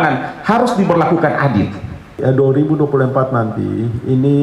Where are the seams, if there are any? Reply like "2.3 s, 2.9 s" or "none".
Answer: 2.1 s